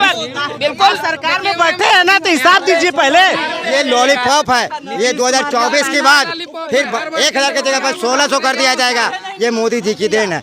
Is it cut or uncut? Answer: cut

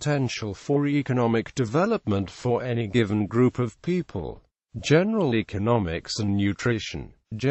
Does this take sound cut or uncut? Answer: uncut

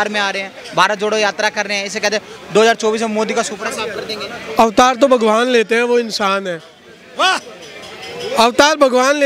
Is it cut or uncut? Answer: uncut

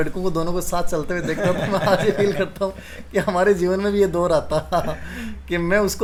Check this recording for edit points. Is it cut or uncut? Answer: uncut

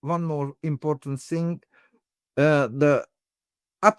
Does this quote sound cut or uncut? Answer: uncut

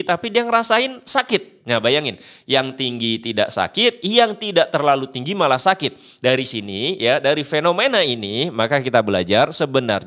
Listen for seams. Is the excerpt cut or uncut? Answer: uncut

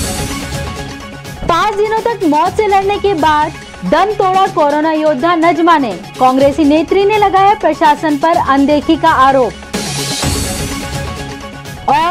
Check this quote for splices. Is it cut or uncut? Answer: cut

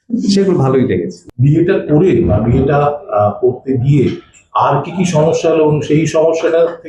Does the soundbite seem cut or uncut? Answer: cut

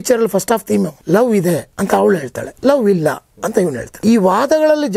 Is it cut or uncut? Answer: cut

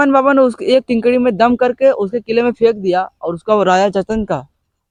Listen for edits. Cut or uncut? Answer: uncut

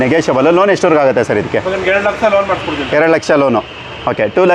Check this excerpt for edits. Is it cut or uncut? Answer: uncut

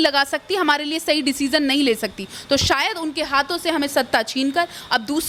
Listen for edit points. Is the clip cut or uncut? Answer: uncut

